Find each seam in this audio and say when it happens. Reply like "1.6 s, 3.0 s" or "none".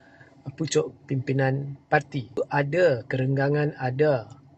2.4 s